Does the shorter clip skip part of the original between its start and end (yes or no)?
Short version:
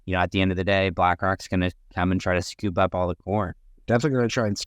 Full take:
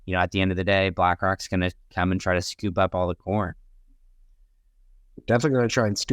yes